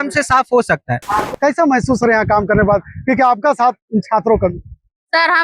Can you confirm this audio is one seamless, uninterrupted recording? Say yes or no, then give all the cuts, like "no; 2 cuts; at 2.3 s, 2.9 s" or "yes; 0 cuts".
no; 1 cut; at 1.2 s